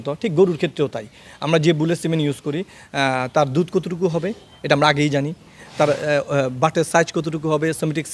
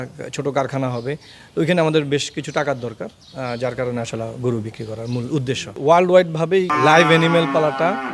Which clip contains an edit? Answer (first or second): second